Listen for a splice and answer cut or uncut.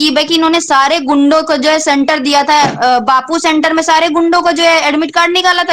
uncut